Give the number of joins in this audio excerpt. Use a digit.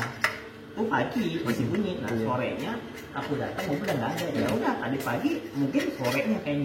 0